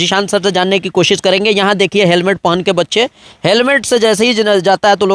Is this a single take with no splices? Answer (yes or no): yes